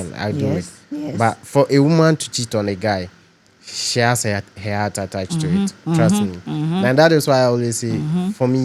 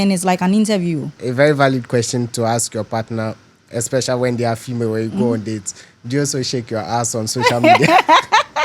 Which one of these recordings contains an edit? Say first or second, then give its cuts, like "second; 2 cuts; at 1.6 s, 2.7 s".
second; 1 cut; at 1.2 s